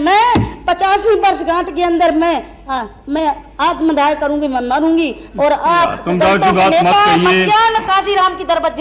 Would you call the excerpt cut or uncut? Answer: uncut